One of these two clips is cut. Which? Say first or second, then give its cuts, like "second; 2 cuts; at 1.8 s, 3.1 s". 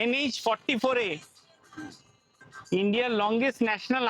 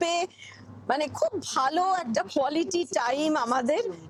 first; 1 cut; at 2.5 s